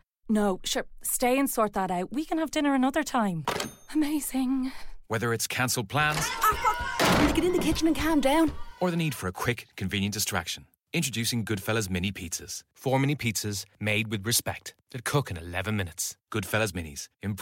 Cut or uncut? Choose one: uncut